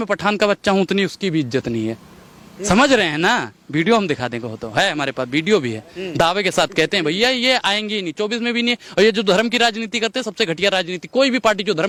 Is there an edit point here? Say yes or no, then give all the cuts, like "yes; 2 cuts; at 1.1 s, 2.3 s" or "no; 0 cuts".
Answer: no; 0 cuts